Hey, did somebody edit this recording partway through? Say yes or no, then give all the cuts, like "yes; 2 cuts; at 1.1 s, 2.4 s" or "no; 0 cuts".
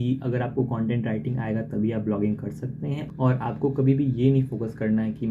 yes; 1 cut; at 3.1 s